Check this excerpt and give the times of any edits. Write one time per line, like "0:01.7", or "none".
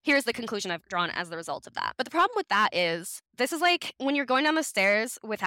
0:03.9